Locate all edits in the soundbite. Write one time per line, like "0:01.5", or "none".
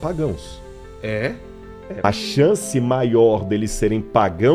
0:02.0